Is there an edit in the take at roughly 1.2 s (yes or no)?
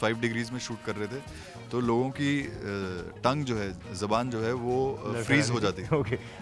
no